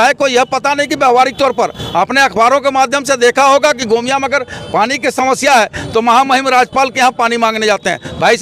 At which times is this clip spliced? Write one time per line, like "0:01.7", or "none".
none